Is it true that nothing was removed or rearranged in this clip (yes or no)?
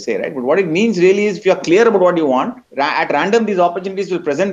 no